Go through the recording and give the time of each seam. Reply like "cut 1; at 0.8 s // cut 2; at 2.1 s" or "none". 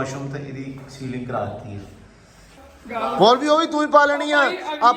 cut 1; at 2.6 s